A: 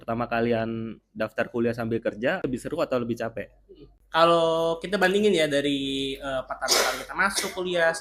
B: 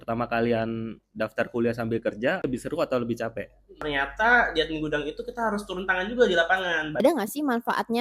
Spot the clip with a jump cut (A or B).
B